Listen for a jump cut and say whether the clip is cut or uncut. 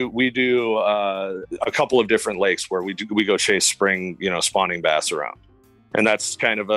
cut